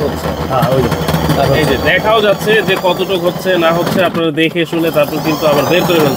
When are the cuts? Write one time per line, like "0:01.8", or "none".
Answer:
none